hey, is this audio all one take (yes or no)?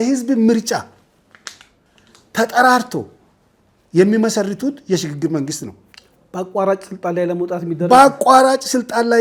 yes